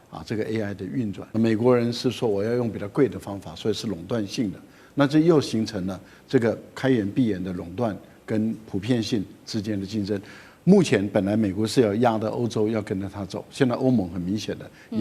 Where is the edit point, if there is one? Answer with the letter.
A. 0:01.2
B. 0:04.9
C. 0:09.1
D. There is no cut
A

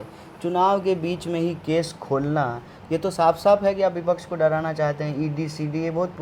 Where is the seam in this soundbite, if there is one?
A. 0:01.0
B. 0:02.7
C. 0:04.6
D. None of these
D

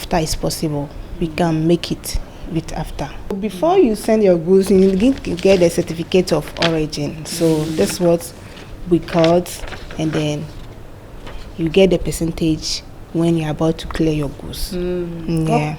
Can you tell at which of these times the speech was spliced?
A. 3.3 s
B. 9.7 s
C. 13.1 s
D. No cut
A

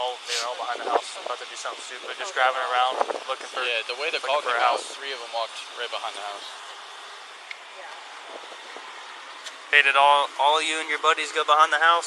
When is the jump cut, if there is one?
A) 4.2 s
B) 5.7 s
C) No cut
C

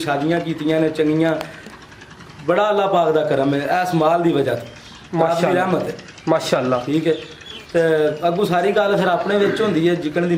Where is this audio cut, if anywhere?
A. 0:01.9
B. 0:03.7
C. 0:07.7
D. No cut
D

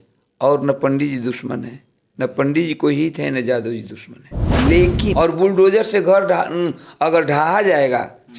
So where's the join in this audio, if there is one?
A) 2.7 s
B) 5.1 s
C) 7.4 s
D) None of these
B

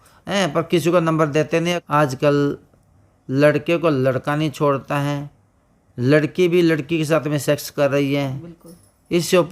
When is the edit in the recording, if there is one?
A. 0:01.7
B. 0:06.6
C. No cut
A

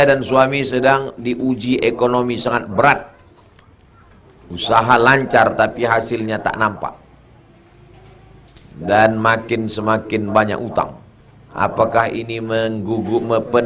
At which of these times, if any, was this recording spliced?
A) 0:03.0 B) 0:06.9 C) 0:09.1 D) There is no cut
D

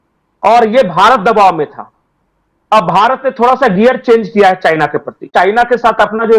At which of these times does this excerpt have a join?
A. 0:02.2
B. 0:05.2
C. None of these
B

